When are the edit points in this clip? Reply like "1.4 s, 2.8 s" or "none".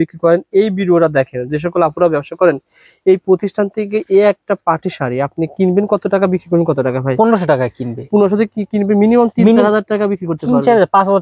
none